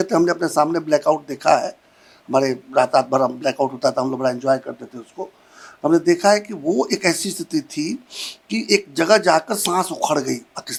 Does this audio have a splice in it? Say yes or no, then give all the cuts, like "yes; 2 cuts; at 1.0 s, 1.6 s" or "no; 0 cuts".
no; 0 cuts